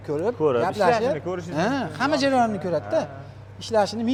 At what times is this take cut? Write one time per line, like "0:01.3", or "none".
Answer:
none